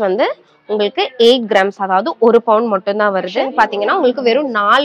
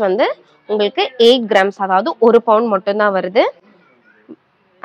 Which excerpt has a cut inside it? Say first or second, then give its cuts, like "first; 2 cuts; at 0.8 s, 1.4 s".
first; 1 cut; at 3.4 s